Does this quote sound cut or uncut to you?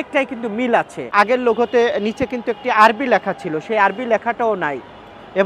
cut